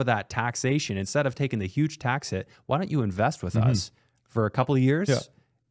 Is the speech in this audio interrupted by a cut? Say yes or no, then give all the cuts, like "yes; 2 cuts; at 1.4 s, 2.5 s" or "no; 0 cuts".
no; 0 cuts